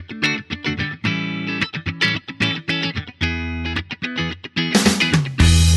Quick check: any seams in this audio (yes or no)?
no